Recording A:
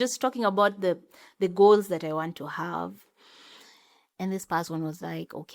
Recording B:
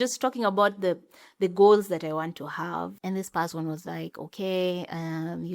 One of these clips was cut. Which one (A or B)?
B